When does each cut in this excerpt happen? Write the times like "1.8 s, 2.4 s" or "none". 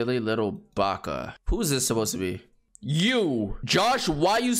1.3 s, 3.6 s